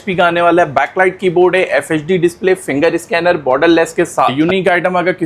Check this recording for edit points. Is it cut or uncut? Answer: cut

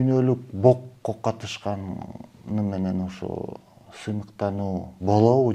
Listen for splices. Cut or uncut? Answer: uncut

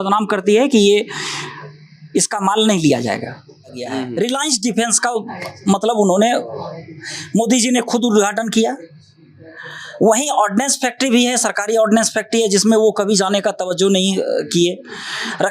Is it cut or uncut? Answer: cut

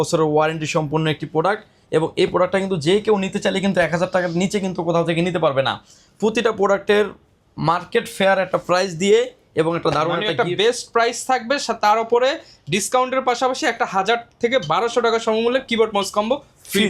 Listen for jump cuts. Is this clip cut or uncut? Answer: uncut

